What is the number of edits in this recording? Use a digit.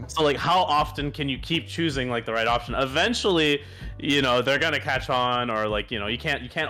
0